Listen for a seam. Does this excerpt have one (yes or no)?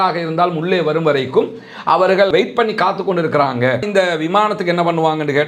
yes